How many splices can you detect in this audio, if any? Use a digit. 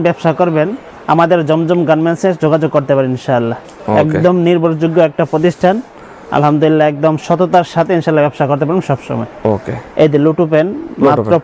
0